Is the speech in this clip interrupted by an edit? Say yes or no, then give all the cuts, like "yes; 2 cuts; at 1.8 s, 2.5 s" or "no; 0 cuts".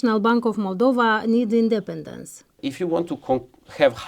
yes; 1 cut; at 2.6 s